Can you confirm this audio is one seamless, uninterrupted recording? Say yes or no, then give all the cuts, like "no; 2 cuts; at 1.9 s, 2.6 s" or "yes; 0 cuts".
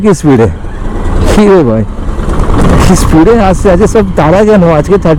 yes; 0 cuts